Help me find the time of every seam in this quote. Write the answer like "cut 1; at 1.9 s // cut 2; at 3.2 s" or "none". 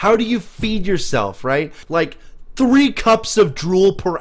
cut 1; at 1.8 s